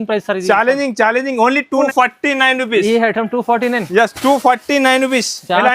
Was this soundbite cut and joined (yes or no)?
yes